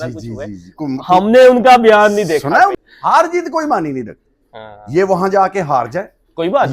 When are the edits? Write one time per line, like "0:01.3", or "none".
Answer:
0:02.8